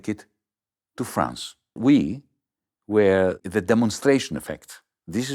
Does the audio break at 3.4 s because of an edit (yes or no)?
yes